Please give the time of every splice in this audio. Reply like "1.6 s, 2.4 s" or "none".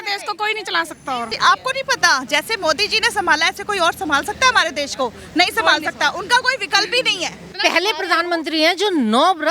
1.3 s, 7.5 s

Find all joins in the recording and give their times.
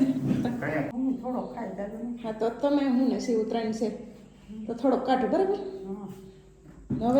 0.9 s

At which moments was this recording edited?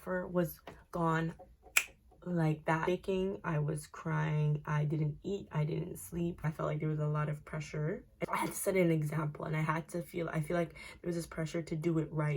2.9 s, 6.4 s, 8.2 s

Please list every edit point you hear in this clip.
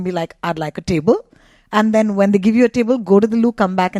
none

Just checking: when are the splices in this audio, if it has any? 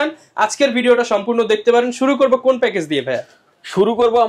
none

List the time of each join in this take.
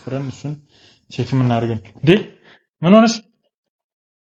none

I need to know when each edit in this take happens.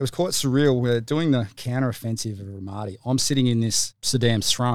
none

